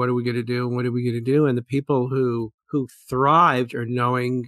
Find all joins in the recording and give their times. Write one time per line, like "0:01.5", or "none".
0:02.6